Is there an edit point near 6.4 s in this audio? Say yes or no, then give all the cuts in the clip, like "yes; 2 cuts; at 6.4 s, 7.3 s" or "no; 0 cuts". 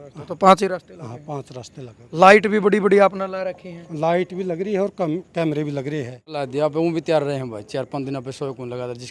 yes; 1 cut; at 6.4 s